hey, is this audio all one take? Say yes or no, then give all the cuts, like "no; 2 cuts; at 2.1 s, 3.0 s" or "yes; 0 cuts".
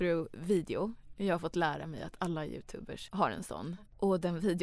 no; 2 cuts; at 3.0 s, 3.7 s